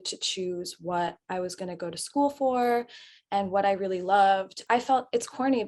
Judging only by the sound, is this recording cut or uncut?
cut